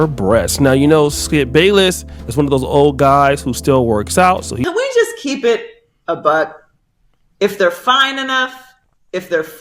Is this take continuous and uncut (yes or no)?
no